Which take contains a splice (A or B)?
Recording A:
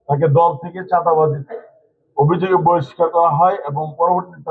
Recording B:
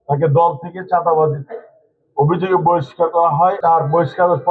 B